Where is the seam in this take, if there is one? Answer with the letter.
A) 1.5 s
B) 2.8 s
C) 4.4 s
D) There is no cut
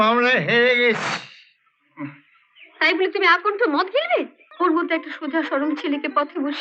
C